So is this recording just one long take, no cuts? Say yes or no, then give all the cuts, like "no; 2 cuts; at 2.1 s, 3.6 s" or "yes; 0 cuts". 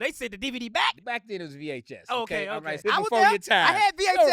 no; 2 cuts; at 1.0 s, 2.8 s